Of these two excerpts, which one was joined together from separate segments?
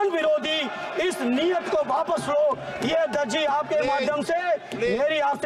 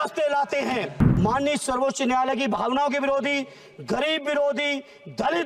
second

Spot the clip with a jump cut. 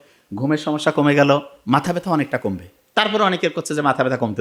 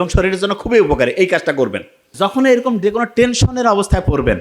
second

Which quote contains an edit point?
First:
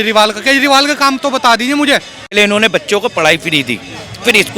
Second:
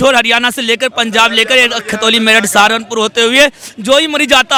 first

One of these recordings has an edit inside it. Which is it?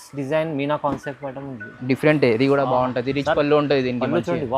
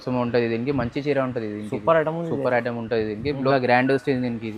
second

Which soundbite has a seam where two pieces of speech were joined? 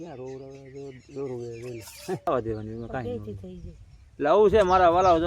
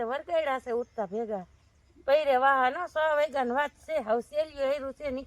first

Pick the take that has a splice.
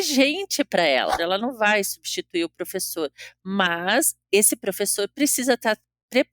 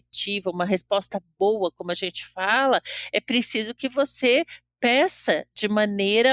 first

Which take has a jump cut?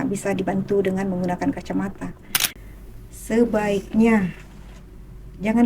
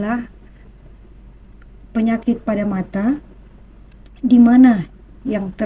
first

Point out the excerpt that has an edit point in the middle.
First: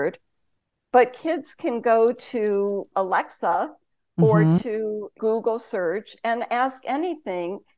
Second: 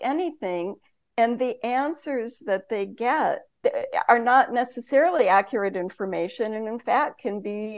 first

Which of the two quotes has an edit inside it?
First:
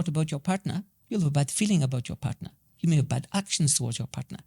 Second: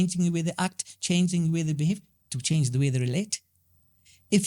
first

